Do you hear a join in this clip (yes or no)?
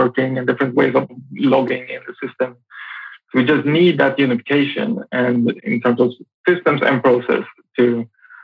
yes